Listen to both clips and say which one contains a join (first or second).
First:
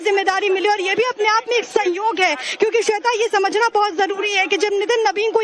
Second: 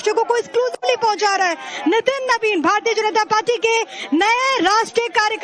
first